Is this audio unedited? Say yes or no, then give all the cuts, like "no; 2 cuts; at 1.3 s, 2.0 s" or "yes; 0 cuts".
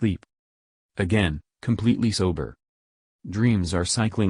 yes; 0 cuts